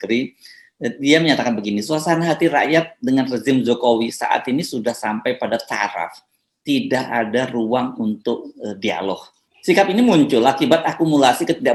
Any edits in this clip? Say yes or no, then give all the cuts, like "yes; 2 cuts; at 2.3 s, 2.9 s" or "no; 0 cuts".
no; 0 cuts